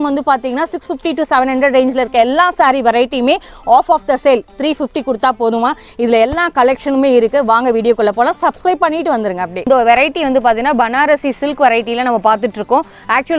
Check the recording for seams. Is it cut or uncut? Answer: cut